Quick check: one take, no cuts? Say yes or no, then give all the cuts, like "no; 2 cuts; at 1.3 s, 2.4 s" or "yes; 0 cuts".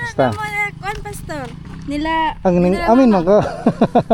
yes; 0 cuts